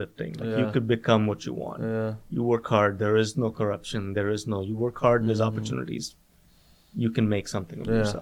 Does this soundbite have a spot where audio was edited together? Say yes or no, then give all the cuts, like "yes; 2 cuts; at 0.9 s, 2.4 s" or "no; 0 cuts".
no; 0 cuts